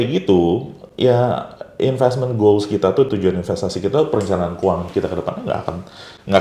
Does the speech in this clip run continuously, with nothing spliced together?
yes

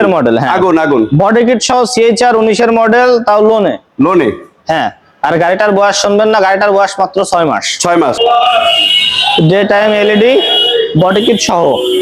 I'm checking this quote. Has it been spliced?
yes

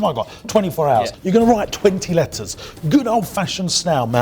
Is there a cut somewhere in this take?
yes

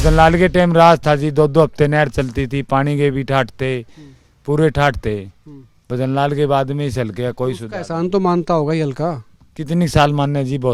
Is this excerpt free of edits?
yes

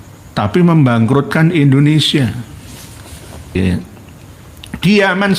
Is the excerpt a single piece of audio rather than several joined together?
no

